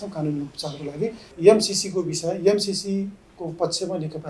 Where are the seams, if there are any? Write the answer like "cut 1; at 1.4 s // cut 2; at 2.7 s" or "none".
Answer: cut 1; at 1.2 s